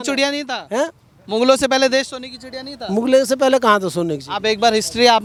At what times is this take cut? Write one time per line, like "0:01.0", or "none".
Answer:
none